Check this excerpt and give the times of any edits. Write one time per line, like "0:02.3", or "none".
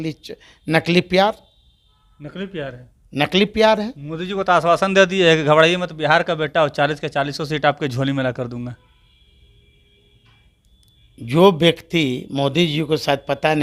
none